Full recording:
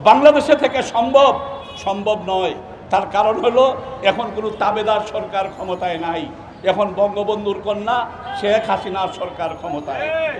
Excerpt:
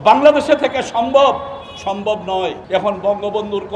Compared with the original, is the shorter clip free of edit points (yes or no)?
no